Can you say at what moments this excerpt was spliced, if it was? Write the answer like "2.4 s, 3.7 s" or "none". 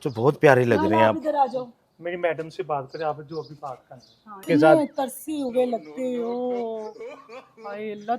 4.4 s